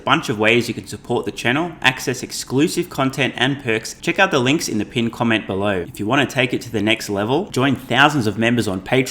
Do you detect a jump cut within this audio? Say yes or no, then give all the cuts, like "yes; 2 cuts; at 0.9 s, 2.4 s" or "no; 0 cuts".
yes; 2 cuts; at 3.9 s, 5.9 s